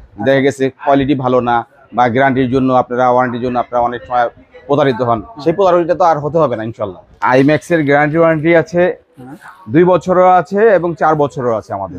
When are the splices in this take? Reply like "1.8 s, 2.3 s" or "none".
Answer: 7.1 s